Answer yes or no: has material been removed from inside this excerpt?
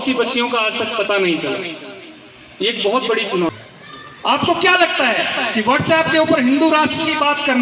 yes